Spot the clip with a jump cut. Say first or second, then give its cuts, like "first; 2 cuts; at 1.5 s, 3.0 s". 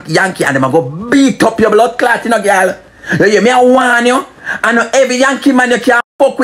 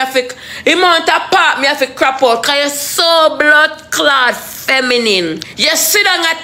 second; 1 cut; at 5.5 s